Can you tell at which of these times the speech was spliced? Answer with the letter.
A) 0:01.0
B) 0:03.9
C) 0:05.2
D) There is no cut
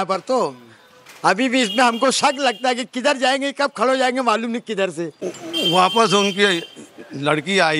C